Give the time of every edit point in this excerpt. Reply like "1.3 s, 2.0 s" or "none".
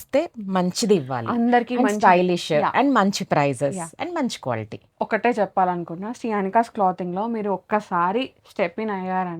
4.8 s

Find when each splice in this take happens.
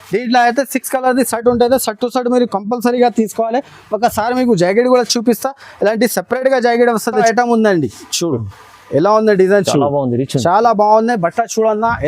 7.1 s

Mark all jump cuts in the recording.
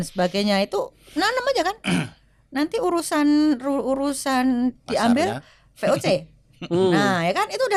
none

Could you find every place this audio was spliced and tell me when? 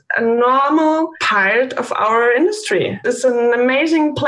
1.2 s, 3.0 s

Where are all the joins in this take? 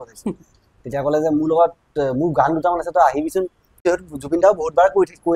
3.8 s

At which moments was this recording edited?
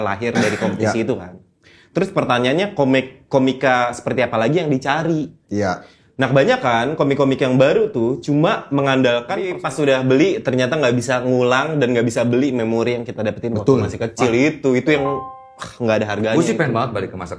9.6 s

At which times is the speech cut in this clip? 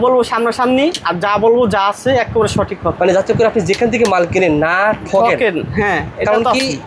none

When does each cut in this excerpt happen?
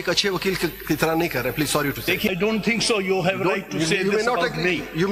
2.3 s

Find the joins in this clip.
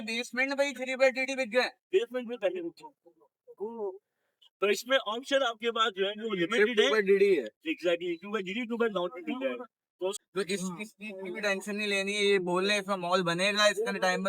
10.2 s

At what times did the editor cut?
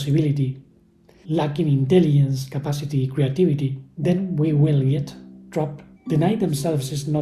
3.8 s, 5.9 s

